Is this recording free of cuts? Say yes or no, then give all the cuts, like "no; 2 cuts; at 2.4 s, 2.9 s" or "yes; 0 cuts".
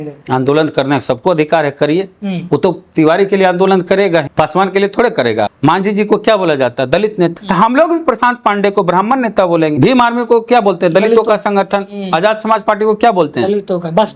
no; 4 cuts; at 4.3 s, 5.5 s, 7.3 s, 9.7 s